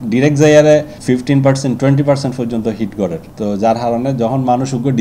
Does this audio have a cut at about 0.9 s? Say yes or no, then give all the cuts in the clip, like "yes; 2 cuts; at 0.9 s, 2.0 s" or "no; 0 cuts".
yes; 2 cuts; at 0.9 s, 3.3 s